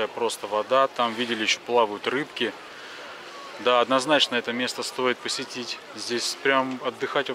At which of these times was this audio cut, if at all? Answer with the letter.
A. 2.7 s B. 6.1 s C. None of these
C